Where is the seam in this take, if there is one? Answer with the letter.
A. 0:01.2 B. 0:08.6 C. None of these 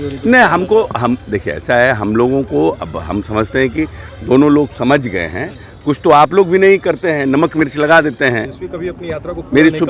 B